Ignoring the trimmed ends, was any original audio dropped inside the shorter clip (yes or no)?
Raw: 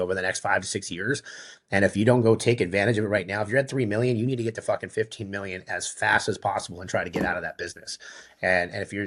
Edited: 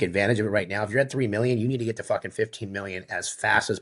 no